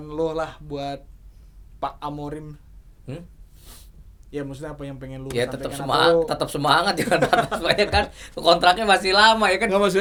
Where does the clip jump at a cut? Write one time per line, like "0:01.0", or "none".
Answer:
none